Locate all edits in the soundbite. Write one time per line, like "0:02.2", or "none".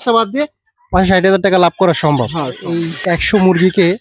0:02.9